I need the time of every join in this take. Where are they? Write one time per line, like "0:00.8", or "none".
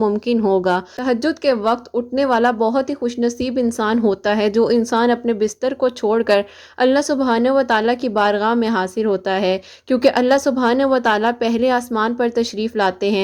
0:00.9